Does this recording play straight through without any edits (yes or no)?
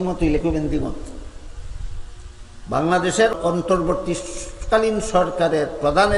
no